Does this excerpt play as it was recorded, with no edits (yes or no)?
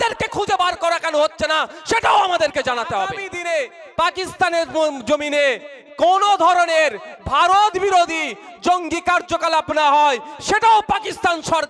no